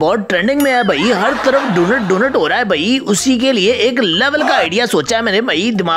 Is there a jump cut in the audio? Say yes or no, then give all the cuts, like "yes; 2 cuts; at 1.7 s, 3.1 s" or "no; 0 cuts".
no; 0 cuts